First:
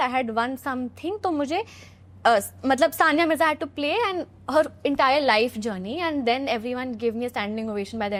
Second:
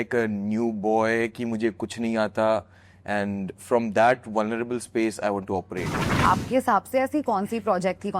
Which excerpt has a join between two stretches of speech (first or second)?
second